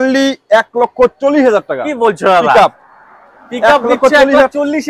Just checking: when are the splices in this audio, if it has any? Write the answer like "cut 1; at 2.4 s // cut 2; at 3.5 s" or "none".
none